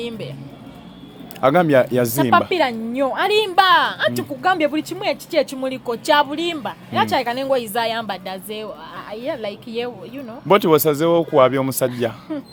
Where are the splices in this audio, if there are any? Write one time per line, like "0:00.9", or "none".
none